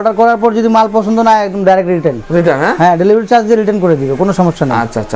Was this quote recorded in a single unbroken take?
yes; 0 cuts

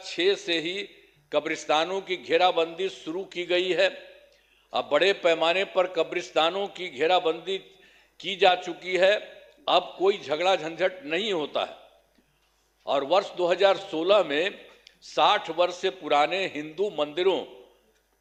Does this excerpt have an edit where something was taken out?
no; 0 cuts

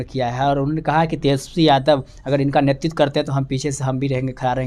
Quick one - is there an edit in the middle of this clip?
no; 0 cuts

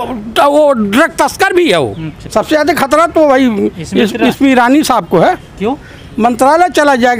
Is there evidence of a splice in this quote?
yes; 1 cut; at 2.1 s

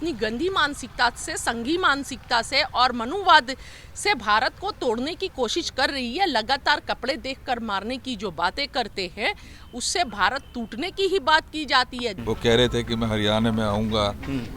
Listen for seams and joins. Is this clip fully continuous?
no; 1 cut; at 12.2 s

